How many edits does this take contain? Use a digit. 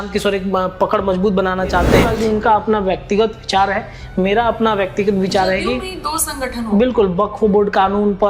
1